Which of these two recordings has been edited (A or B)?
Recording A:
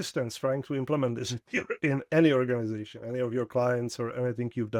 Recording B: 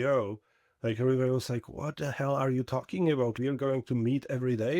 B